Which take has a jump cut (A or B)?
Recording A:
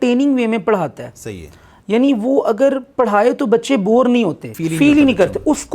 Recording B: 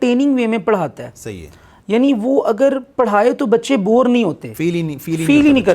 A